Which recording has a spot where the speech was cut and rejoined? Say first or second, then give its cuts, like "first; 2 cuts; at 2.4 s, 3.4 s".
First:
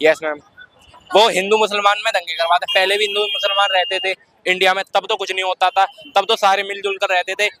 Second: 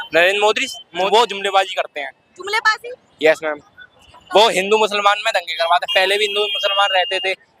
second; 1 cut; at 1.1 s